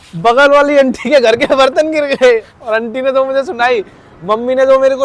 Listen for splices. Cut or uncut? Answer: uncut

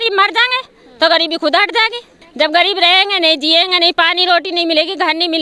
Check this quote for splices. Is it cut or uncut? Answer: uncut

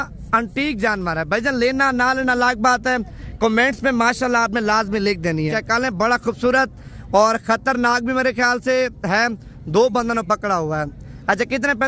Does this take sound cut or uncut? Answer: cut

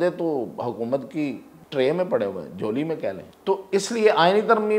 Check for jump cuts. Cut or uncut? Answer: cut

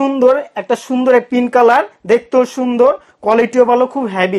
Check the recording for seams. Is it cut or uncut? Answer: uncut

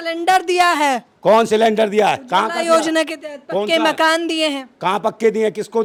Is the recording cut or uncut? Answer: uncut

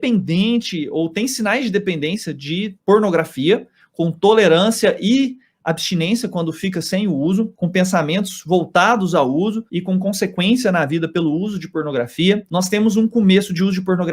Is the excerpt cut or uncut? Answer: uncut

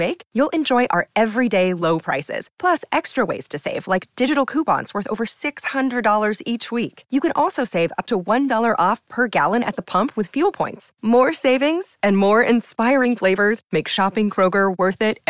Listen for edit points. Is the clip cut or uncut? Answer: uncut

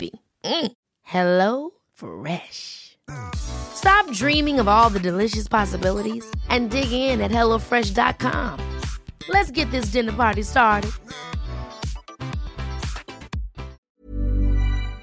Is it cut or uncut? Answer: cut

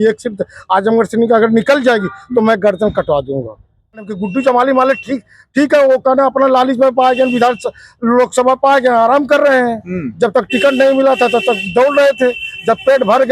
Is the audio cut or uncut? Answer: cut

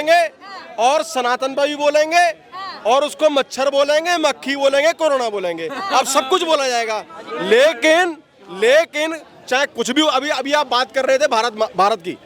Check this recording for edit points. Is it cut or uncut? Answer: uncut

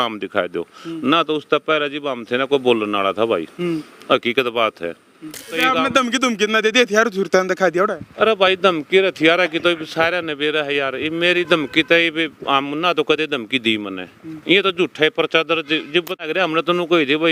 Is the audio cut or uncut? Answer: cut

